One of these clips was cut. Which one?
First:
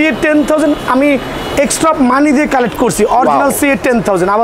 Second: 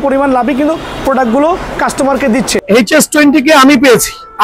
second; 1 cut; at 2.6 s

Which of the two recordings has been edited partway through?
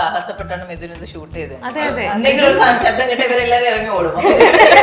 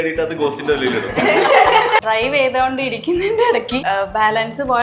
second; 2 cuts; at 2.0 s, 3.8 s

